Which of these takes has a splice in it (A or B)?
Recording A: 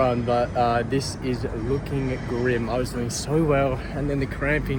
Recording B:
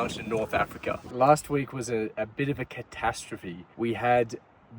B